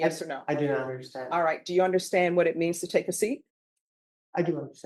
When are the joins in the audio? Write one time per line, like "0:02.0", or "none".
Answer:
none